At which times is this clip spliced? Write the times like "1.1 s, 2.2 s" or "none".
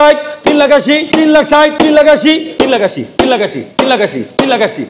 1.0 s, 1.7 s, 2.5 s